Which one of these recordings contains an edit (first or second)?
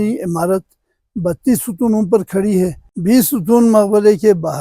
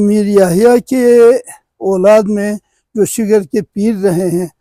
first